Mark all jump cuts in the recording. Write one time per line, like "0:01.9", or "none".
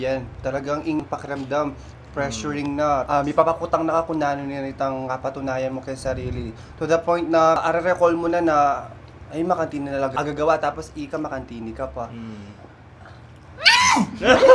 0:01.0
0:03.0
0:07.6
0:10.1